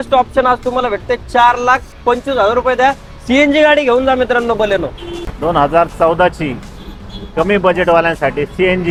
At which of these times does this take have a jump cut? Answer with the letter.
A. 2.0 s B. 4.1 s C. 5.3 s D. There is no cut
D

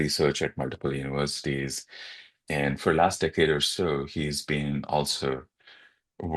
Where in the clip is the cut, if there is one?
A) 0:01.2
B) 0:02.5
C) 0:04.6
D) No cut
D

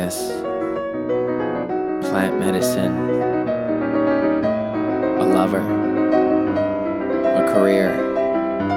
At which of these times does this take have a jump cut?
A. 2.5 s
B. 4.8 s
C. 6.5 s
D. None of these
D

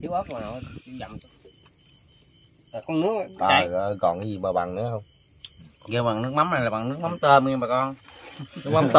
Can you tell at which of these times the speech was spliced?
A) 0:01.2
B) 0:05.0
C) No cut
A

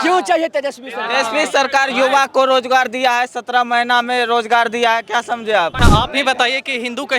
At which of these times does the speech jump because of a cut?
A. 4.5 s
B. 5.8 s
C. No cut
B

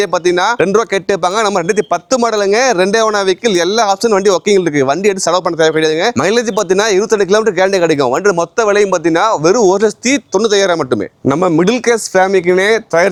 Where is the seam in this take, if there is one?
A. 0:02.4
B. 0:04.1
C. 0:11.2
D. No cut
D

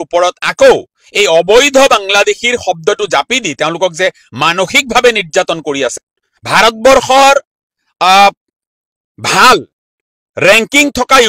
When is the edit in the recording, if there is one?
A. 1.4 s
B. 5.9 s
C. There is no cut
B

